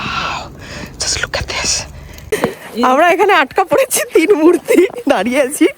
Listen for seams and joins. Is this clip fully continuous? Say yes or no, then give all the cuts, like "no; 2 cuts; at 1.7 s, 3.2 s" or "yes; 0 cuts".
no; 1 cut; at 2.3 s